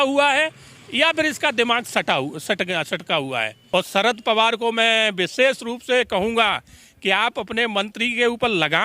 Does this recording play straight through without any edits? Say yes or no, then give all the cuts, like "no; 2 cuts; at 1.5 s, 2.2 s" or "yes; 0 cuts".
no; 1 cut; at 3.5 s